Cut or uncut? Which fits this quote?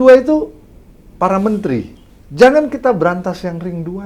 cut